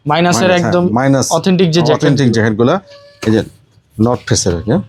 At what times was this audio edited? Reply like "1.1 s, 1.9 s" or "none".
none